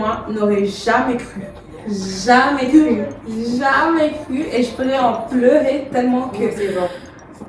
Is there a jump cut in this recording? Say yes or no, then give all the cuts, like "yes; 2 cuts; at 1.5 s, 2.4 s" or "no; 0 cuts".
no; 0 cuts